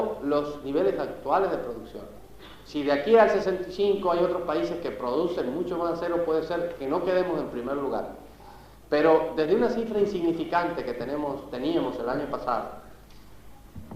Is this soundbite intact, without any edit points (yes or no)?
no